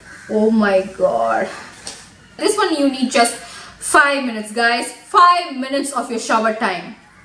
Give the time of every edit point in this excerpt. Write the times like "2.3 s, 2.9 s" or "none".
2.4 s